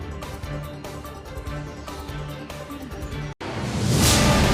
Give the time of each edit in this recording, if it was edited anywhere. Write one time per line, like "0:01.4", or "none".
none